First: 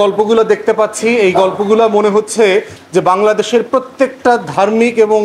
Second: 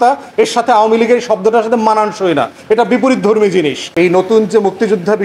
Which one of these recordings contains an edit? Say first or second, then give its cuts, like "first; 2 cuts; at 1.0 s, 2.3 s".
second; 1 cut; at 3.9 s